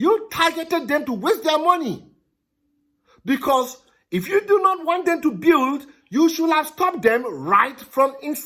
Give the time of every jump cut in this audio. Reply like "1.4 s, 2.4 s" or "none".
none